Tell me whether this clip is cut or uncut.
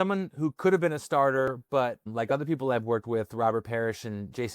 cut